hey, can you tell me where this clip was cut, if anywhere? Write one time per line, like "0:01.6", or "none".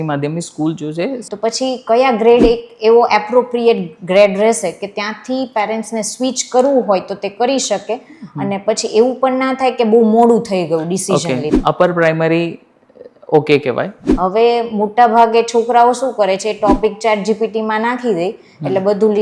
0:01.2
0:11.5
0:14.0